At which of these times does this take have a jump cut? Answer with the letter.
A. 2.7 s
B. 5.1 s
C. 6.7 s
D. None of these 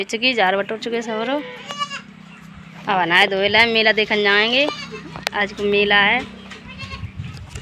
D